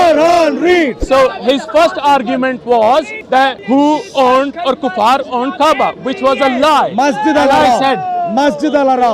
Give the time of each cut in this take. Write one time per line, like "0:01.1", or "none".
0:01.0
0:03.4